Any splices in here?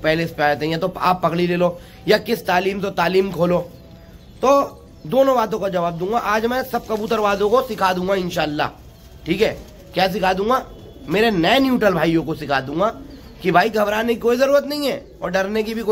no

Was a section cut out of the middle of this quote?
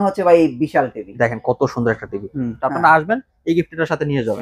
yes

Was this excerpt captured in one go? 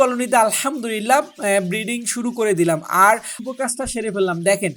no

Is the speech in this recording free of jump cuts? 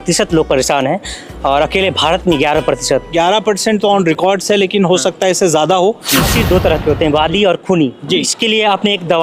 no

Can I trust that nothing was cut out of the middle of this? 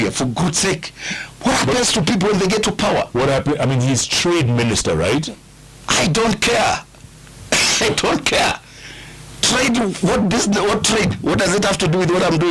yes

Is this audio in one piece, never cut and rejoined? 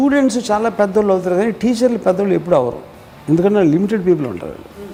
yes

